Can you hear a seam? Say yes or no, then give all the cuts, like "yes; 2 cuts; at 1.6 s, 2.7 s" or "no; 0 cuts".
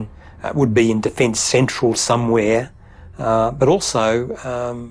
yes; 1 cut; at 3.9 s